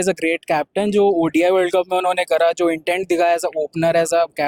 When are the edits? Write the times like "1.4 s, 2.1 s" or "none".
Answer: none

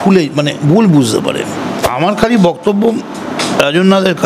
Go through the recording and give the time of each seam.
1.9 s

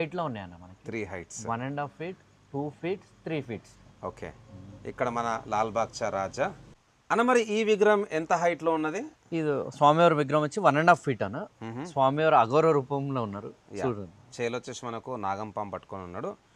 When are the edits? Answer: none

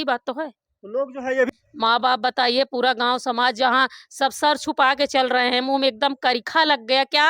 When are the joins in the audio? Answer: 1.5 s

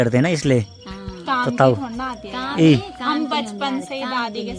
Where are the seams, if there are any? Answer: none

